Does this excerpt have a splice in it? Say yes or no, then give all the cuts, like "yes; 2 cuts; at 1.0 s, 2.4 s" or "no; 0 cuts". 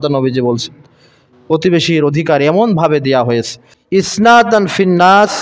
yes; 1 cut; at 3.5 s